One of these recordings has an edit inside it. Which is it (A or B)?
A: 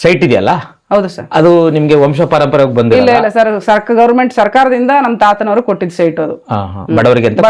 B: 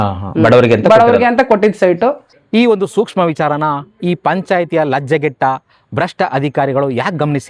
B